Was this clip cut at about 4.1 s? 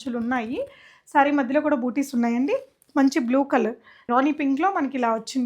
yes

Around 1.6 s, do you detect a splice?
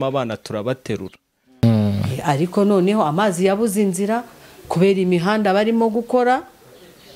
yes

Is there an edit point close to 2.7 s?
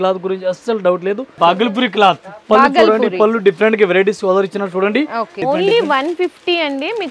no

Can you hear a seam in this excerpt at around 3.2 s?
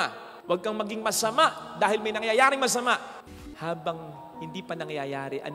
yes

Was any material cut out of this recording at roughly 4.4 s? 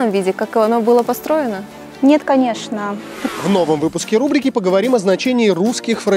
no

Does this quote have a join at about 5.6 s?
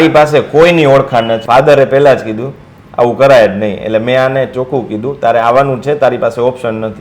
no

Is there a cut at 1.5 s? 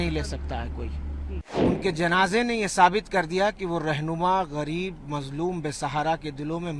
yes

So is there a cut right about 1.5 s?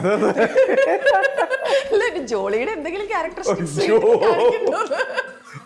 no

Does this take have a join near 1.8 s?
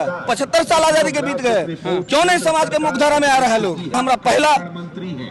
no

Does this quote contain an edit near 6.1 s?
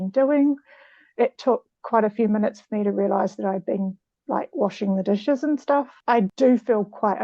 yes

